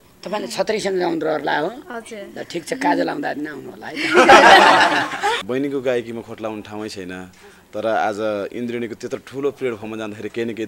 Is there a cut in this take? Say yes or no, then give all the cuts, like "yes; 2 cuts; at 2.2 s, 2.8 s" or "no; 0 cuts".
yes; 1 cut; at 5.4 s